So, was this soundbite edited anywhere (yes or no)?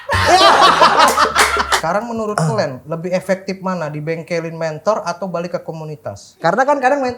yes